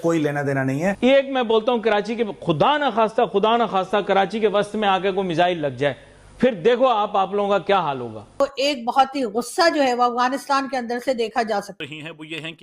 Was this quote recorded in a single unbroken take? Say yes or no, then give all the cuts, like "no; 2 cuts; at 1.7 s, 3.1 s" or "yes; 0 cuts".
no; 1 cut; at 11.7 s